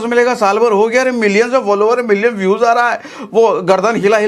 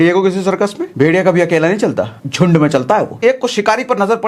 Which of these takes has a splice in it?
second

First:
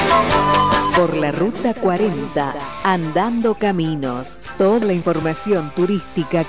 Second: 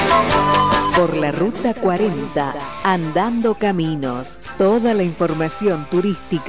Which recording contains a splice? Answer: first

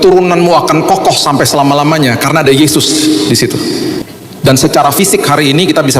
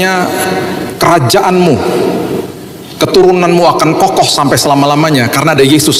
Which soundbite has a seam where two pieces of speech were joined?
first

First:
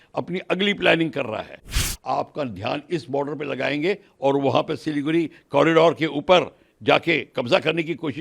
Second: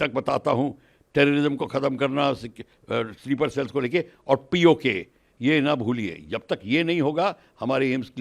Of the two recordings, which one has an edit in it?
first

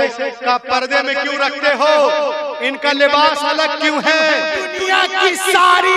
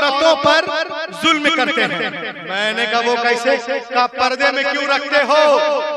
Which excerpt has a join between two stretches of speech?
first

